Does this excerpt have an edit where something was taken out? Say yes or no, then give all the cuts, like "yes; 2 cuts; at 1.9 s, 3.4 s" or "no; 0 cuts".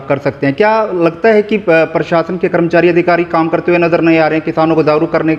no; 0 cuts